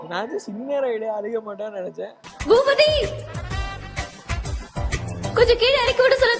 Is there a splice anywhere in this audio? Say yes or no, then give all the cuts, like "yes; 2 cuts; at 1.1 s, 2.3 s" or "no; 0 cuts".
no; 0 cuts